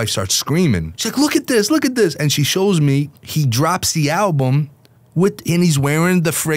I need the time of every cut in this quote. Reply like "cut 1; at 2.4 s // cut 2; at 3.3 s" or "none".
cut 1; at 1.0 s // cut 2; at 3.2 s